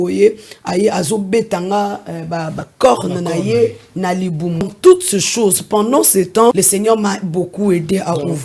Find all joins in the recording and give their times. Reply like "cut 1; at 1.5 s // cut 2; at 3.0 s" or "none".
cut 1; at 2.7 s // cut 2; at 4.6 s // cut 3; at 6.5 s